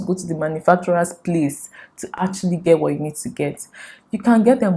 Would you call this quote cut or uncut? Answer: uncut